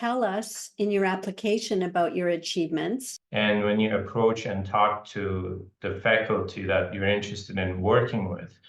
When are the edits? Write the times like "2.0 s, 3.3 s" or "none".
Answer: 3.2 s